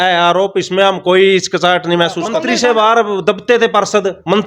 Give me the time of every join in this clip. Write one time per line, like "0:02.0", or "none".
0:02.4